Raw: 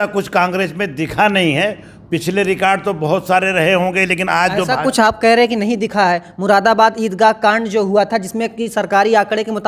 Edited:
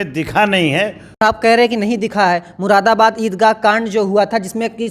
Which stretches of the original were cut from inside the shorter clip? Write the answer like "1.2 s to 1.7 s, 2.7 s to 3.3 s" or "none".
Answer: 2.0 s to 5.0 s